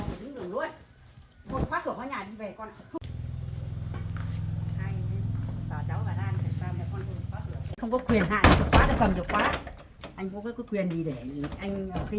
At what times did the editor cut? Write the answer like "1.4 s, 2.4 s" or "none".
3.0 s, 7.7 s